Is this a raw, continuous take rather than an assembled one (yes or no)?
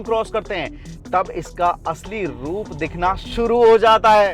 yes